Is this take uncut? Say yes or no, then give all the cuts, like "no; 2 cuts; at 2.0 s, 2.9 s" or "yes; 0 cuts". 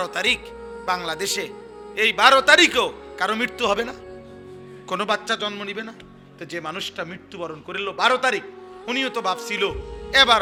yes; 0 cuts